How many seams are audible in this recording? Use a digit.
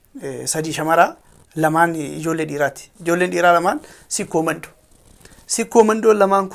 0